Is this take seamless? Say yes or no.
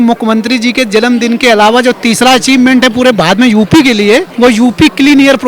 no